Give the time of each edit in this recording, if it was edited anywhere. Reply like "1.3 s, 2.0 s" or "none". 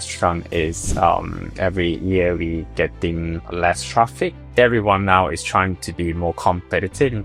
4.5 s